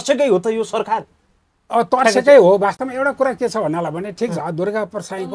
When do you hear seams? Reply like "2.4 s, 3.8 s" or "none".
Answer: none